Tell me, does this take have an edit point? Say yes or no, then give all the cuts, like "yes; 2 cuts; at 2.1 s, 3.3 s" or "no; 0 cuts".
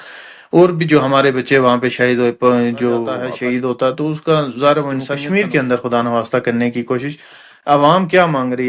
yes; 2 cuts; at 3.2 s, 5.1 s